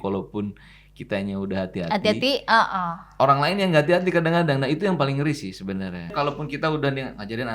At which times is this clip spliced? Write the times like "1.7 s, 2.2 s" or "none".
6.1 s